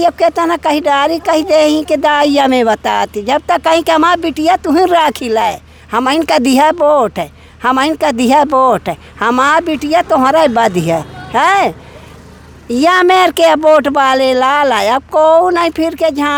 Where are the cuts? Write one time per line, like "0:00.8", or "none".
none